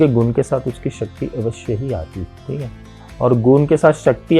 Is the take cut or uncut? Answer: cut